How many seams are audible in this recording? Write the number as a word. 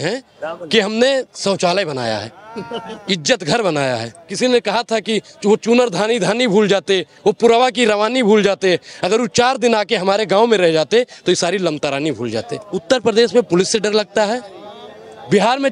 two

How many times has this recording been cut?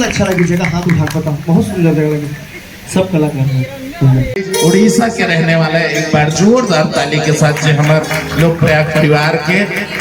one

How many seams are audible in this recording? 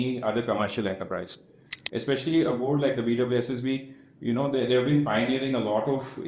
one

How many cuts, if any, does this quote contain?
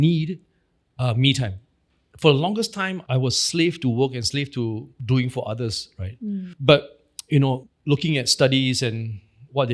two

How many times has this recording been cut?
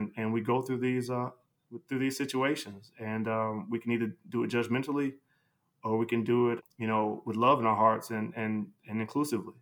one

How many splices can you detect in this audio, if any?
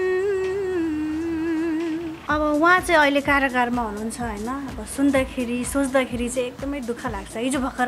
one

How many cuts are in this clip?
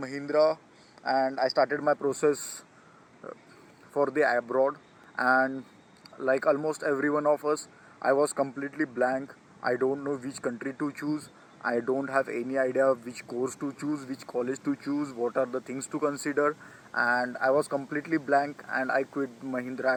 zero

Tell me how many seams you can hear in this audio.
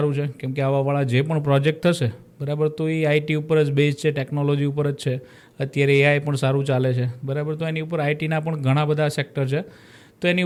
zero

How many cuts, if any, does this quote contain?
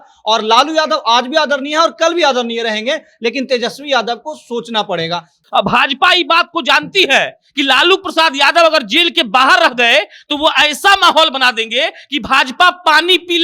one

